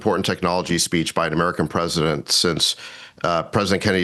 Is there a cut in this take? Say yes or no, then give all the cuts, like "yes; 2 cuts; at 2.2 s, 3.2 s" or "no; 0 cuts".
no; 0 cuts